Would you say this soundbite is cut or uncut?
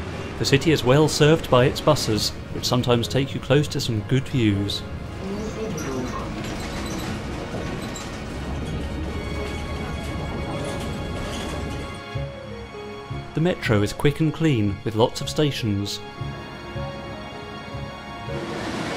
uncut